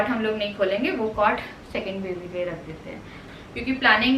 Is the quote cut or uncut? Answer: cut